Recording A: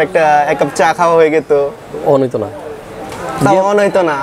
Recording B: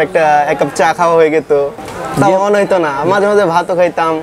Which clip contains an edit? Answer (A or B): B